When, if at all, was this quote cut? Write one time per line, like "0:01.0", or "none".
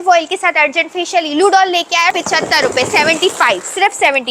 0:02.1